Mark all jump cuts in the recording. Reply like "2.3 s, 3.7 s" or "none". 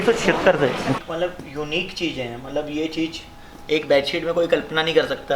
1.0 s